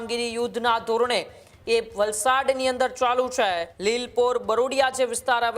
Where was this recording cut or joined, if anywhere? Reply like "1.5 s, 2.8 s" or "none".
3.7 s